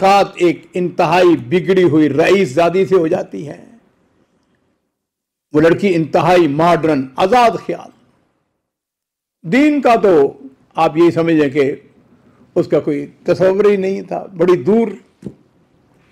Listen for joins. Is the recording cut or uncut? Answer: uncut